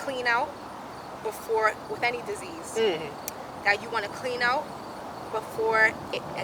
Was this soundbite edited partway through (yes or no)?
no